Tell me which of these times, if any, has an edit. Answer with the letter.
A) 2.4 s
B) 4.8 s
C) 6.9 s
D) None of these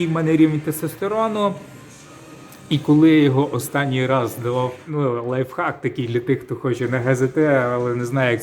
B